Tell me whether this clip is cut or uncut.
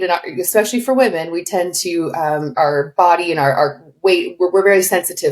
cut